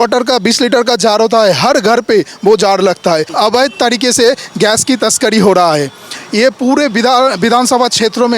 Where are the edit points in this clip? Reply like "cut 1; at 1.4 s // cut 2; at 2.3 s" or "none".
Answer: cut 1; at 3.3 s